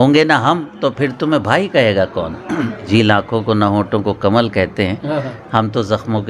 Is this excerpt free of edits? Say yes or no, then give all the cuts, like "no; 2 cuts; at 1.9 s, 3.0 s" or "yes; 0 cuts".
no; 1 cut; at 2.9 s